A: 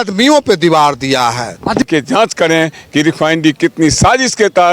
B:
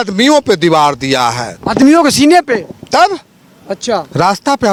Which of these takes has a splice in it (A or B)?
A